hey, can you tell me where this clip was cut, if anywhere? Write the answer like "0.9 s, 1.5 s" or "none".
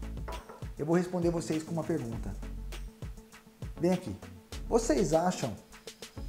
2.4 s, 3.7 s